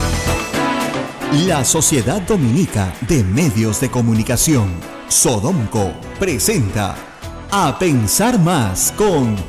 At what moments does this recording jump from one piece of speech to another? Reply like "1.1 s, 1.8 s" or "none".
1.1 s